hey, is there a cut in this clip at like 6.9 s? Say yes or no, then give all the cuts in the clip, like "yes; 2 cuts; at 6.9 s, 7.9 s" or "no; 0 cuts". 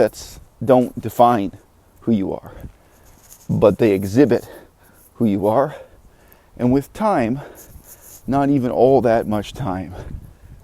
no; 0 cuts